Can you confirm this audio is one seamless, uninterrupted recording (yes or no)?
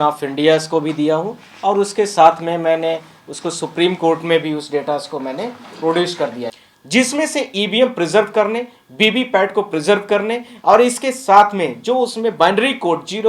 no